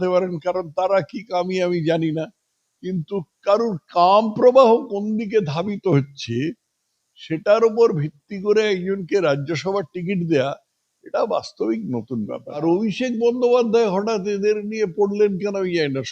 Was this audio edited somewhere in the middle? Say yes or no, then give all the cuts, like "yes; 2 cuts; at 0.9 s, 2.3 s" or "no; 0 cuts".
yes; 1 cut; at 12.6 s